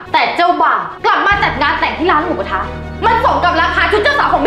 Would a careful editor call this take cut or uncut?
cut